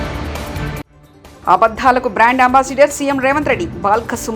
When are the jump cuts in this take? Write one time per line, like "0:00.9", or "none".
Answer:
0:00.9